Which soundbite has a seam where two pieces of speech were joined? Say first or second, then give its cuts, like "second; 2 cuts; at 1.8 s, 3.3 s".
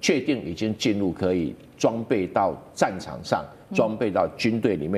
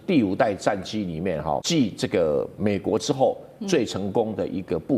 second; 1 cut; at 1.6 s